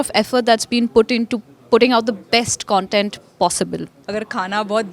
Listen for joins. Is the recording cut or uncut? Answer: cut